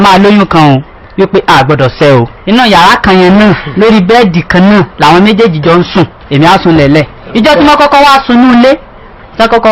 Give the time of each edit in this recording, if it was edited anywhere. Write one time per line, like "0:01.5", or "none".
0:02.4